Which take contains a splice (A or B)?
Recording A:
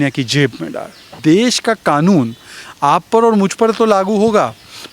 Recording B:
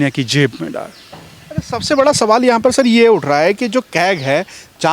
A